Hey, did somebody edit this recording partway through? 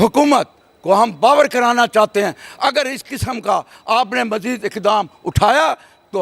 no; 0 cuts

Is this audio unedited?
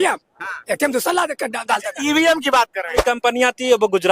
no; 1 cut; at 3.0 s

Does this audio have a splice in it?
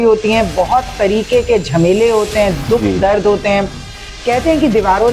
no; 0 cuts

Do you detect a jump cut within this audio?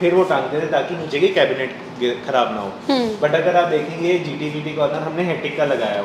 no; 0 cuts

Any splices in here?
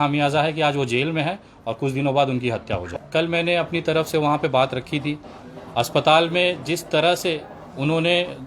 no; 0 cuts

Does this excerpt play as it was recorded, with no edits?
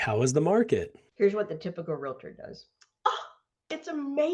no; 1 cut; at 1.0 s

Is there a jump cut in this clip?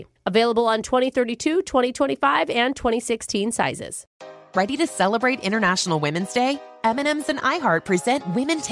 yes; 1 cut; at 4.1 s

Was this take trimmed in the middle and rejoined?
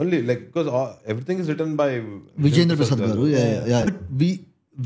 yes; 1 cut; at 3.9 s

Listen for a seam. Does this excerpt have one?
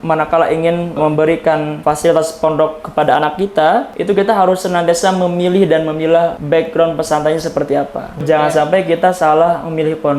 yes; 1 cut; at 8.2 s

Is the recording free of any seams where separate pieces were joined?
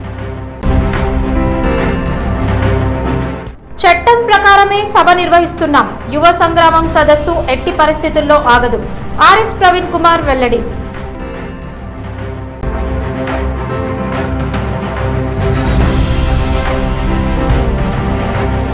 no; 1 cut; at 12.5 s

